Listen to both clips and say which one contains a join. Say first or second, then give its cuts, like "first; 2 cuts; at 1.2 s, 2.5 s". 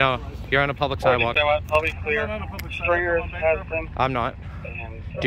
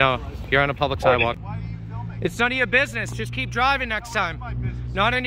second; 1 cut; at 1.3 s